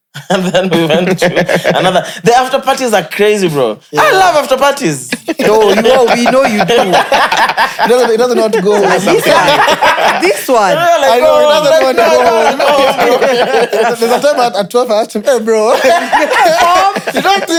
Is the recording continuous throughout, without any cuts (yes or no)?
yes